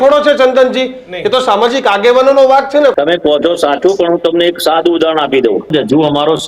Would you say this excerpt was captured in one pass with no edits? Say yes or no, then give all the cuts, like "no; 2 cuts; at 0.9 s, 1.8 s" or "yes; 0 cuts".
no; 2 cuts; at 2.9 s, 5.7 s